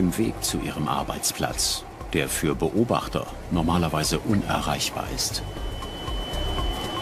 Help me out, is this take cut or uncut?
uncut